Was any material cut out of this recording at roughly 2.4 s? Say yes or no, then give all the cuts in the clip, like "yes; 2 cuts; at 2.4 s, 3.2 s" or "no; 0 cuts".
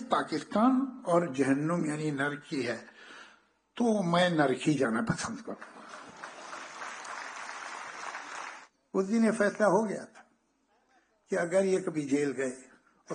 no; 1 cut; at 8.6 s